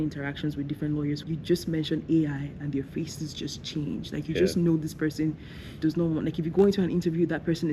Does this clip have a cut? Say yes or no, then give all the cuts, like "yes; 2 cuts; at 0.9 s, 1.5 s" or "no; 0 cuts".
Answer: yes; 1 cut; at 1.2 s